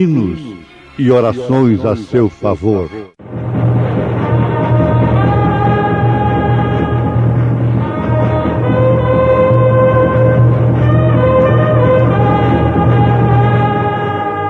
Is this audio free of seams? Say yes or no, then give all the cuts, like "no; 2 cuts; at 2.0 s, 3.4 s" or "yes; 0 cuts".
yes; 0 cuts